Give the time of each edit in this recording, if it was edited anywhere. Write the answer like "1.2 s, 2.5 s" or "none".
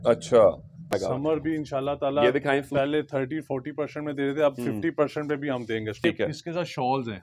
0.9 s, 6.0 s